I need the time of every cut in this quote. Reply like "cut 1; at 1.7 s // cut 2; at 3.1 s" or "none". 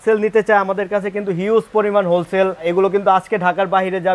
cut 1; at 2.7 s